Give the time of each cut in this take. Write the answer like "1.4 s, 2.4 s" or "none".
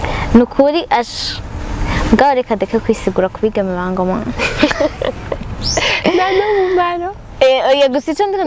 none